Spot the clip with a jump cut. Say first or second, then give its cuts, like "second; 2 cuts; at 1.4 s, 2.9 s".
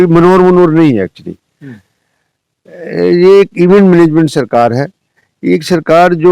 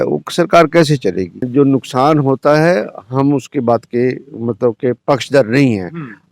second; 1 cut; at 1.5 s